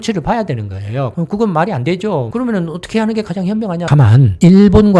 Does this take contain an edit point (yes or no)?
yes